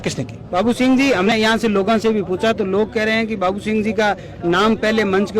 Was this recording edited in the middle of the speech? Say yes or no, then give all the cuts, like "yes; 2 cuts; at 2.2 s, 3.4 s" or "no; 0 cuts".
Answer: yes; 1 cut; at 1.3 s